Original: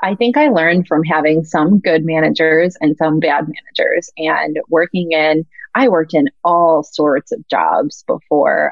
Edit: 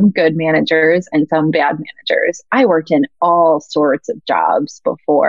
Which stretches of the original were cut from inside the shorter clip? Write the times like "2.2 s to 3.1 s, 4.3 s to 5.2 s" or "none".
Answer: 4.1 s to 5.6 s